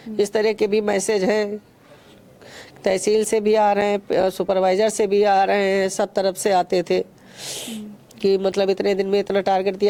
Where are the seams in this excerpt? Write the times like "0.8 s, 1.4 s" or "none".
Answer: none